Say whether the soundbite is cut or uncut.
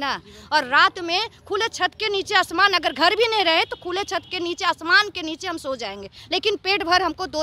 uncut